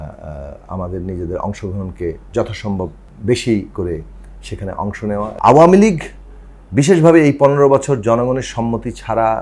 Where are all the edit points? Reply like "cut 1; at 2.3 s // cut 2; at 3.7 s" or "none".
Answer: cut 1; at 3.1 s // cut 2; at 5.3 s